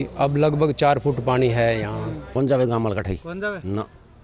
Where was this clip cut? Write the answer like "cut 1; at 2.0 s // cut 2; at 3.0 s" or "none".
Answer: cut 1; at 2.1 s